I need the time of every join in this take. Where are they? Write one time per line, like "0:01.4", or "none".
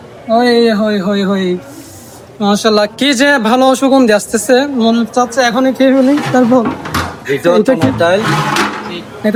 none